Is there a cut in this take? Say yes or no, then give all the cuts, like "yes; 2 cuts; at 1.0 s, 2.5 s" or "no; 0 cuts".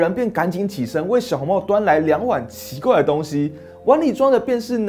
no; 0 cuts